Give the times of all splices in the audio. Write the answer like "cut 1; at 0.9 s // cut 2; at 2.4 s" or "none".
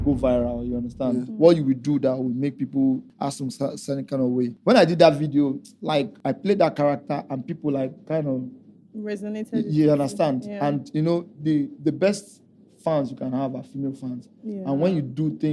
cut 1; at 3.1 s // cut 2; at 4.5 s // cut 3; at 6.1 s